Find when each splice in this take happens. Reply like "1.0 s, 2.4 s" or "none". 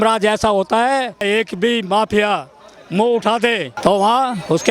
1.2 s, 3.7 s